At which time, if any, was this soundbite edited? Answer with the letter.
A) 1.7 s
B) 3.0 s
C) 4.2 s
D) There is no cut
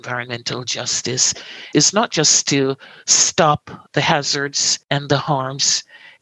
A